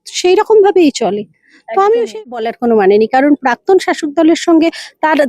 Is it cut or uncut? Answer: cut